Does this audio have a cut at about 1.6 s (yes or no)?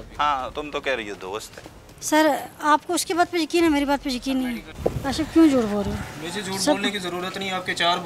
no